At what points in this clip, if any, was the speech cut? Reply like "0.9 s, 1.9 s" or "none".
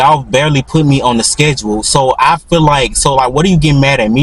none